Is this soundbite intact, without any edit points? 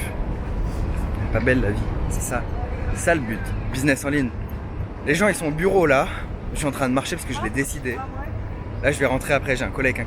yes; 0 cuts

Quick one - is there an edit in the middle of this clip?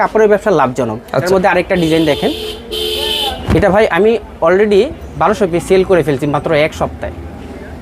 yes; 1 cut; at 1.2 s

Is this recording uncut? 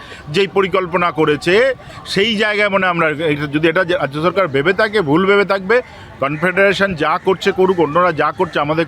yes; 0 cuts

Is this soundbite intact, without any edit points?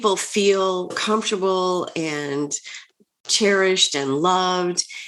no; 1 cut; at 1.0 s

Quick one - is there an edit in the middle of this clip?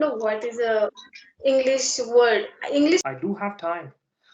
yes; 1 cut; at 3.0 s

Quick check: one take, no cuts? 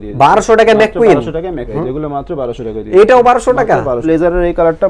no; 2 cuts; at 1.7 s, 4.0 s

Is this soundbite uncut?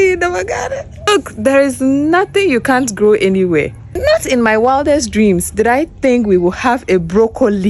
no; 2 cuts; at 1.1 s, 3.8 s

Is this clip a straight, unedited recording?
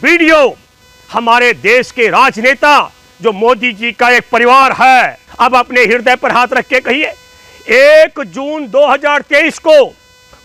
no; 1 cut; at 5.3 s

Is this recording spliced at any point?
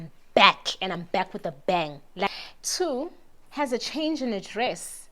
yes; 1 cut; at 2.3 s

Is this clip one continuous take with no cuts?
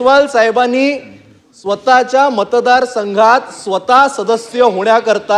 yes; 0 cuts

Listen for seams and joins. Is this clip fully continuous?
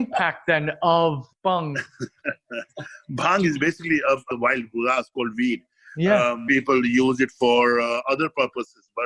no; 3 cuts; at 1.3 s, 4.3 s, 6.4 s

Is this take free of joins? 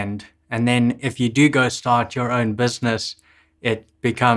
yes; 0 cuts

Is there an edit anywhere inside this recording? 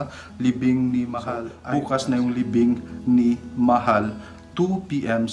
yes; 1 cut; at 1.5 s

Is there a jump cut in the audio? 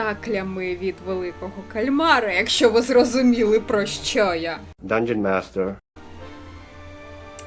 no; 0 cuts

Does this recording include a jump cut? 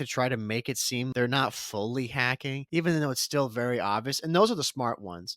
yes; 2 cuts; at 1.1 s, 2.7 s

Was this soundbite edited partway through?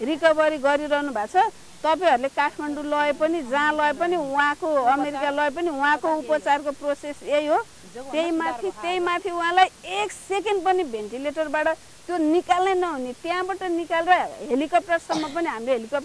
no; 0 cuts

